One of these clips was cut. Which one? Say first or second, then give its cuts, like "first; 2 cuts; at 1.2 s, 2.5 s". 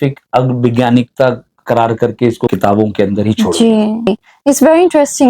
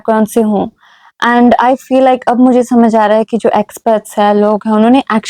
first; 1 cut; at 4.1 s